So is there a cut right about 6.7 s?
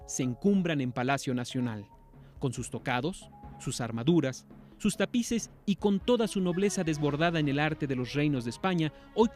no; 1 cut; at 4.4 s

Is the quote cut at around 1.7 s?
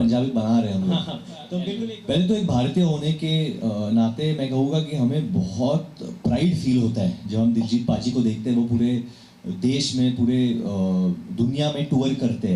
yes; 1 cut; at 1.7 s

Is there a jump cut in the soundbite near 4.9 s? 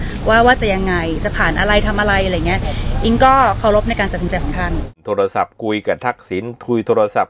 yes; 1 cut; at 4.9 s

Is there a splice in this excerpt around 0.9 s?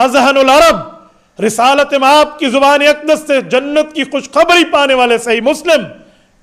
no; 0 cuts

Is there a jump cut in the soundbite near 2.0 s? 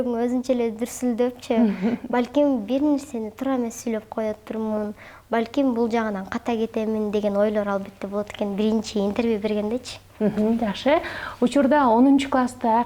no; 0 cuts

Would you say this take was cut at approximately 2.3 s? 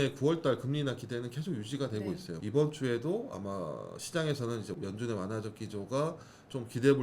yes; 1 cut; at 2.3 s

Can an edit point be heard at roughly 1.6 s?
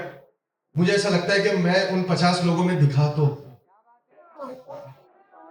no; 1 cut; at 4.5 s

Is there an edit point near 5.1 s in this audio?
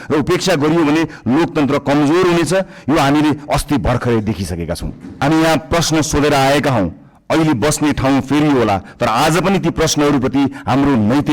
yes; 1 cut; at 5.1 s

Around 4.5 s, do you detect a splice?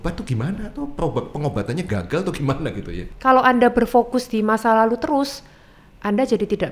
no; 1 cut; at 3.1 s

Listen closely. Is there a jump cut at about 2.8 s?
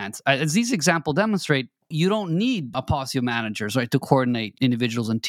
yes; 3 cuts; at 1.9 s, 2.8 s, 4.5 s

